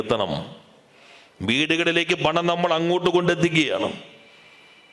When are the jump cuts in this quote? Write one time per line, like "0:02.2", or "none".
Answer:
none